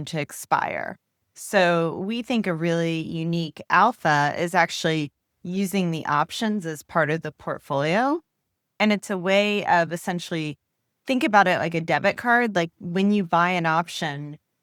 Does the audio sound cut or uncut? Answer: uncut